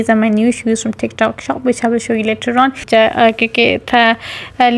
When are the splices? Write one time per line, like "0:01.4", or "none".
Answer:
0:02.8